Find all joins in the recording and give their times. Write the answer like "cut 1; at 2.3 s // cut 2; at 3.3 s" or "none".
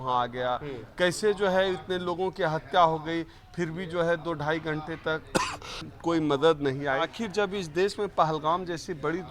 cut 1; at 5.7 s // cut 2; at 7.1 s